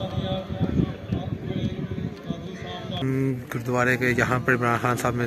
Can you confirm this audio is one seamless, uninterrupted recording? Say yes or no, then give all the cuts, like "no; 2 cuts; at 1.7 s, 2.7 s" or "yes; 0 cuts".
no; 1 cut; at 3.0 s